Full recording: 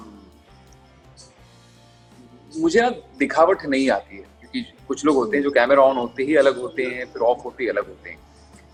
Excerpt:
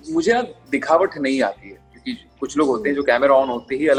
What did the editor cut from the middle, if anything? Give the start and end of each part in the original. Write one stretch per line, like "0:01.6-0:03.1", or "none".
none